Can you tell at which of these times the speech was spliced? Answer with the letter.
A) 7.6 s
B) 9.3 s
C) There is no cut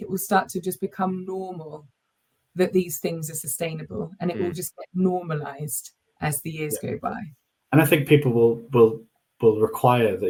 C